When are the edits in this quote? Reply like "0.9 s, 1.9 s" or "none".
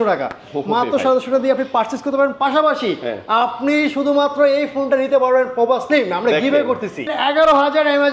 7.1 s

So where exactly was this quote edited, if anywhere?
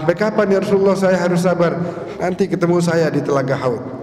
2.0 s

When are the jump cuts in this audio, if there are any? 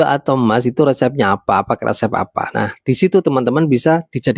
none

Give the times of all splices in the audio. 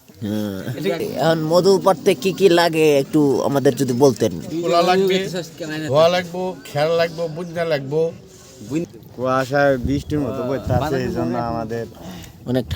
1.0 s, 8.9 s

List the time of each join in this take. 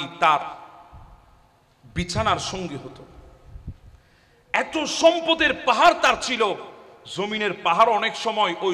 none

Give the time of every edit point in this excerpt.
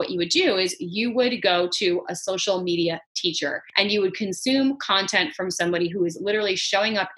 3.6 s

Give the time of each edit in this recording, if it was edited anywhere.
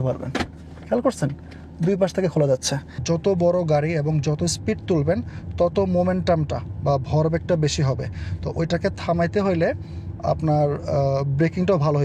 2.9 s

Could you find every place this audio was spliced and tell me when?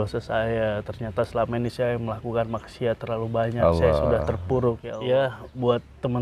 4.9 s

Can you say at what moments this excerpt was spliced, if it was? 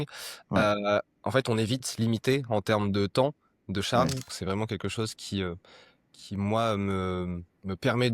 4.3 s

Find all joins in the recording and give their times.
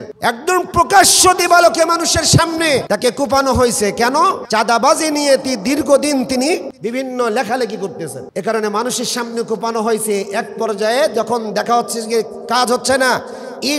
2.8 s, 4.4 s

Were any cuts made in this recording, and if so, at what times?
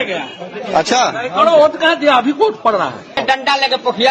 3.2 s

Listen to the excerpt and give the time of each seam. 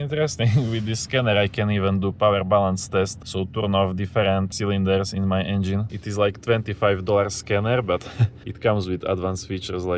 3.2 s, 4.5 s, 6.0 s

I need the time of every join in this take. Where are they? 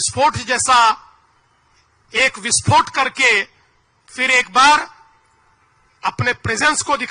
none

